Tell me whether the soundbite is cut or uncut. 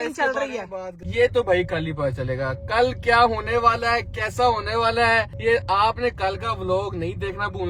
cut